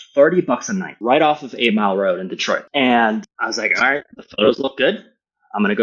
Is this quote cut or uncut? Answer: cut